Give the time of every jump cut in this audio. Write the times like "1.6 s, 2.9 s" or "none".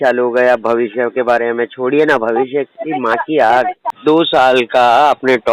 3.9 s